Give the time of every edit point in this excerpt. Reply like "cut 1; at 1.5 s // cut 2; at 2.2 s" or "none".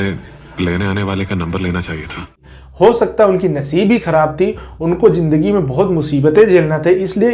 cut 1; at 2.4 s